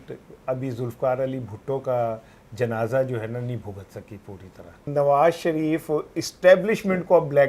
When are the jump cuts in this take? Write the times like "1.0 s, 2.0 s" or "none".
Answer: 4.9 s